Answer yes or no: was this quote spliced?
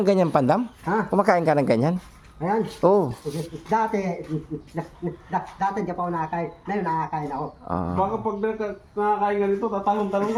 no